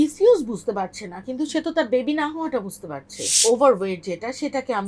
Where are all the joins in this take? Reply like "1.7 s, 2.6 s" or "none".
3.3 s